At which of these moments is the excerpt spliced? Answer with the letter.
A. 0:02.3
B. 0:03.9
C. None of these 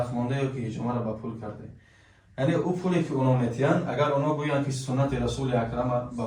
C